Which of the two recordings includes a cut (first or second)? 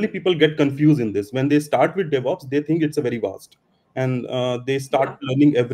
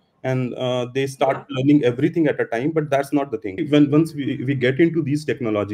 second